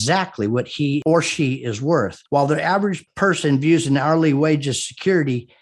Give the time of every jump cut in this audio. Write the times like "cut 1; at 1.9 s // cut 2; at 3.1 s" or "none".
cut 1; at 1.0 s // cut 2; at 2.2 s